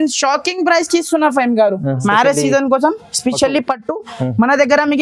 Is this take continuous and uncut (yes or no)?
no